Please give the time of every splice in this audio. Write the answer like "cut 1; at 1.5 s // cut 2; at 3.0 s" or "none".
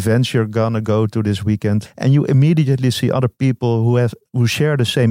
cut 1; at 1.9 s